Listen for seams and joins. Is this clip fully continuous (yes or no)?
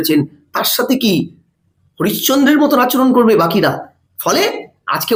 yes